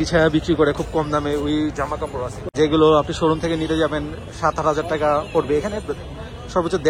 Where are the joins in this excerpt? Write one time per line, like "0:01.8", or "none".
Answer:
0:02.4